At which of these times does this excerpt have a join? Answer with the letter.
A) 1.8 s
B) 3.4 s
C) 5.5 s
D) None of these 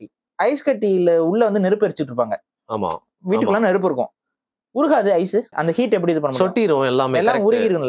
C